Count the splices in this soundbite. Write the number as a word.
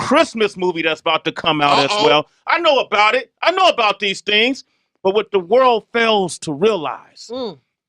one